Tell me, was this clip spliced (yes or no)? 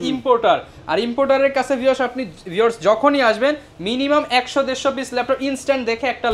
no